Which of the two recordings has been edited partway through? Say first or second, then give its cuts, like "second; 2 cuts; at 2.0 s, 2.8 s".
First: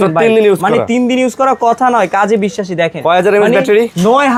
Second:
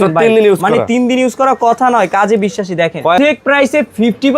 second; 1 cut; at 3.2 s